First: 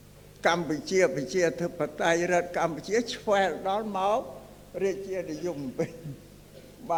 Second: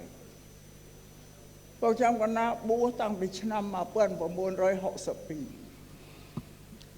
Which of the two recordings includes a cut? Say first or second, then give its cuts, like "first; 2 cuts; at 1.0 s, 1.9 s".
second; 1 cut; at 5.5 s